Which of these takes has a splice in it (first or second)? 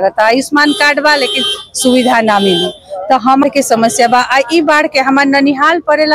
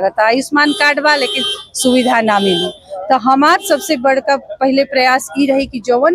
first